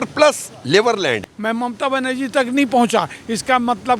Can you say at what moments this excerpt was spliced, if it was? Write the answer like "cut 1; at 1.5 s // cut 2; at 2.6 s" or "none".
cut 1; at 1.3 s